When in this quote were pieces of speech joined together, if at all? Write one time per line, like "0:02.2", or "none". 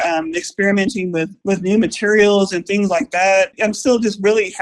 0:01.3
0:03.5